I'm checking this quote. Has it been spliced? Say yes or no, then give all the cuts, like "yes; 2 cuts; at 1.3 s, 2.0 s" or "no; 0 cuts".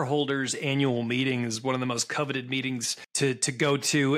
yes; 1 cut; at 3.0 s